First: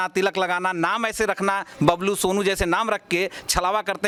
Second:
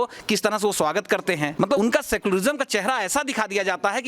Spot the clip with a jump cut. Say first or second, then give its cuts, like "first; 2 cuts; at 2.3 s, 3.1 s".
second; 1 cut; at 1.6 s